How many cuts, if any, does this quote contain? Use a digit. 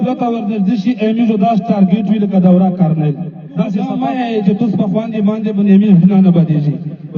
1